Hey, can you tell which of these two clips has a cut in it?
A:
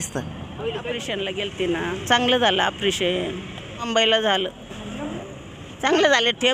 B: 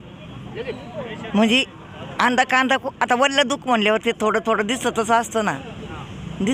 A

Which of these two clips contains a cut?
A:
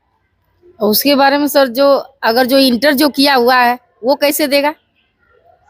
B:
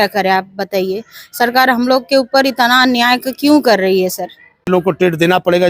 B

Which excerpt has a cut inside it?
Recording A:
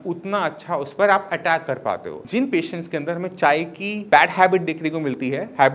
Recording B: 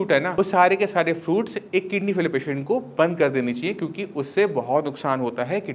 A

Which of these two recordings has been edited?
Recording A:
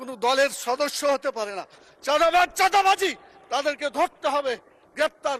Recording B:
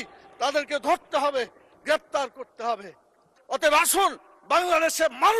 B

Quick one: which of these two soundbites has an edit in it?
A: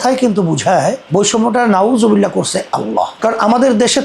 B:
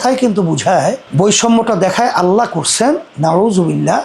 B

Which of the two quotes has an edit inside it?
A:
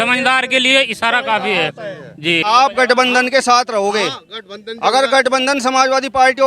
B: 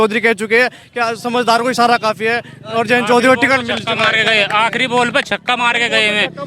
A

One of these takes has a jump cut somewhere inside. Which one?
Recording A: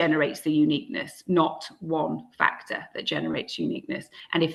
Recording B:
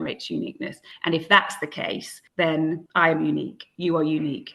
B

